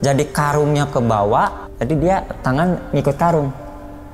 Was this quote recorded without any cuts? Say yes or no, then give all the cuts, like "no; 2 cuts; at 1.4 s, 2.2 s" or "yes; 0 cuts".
no; 1 cut; at 1.6 s